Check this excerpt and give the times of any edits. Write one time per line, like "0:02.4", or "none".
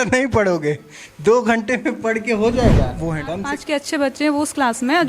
0:03.2